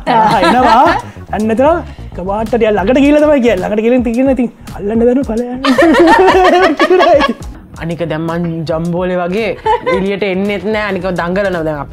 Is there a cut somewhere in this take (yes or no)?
yes